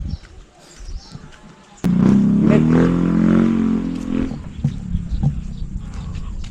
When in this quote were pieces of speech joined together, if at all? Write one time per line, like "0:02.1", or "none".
0:01.8